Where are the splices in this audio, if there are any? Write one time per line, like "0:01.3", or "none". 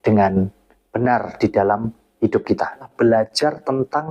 0:02.9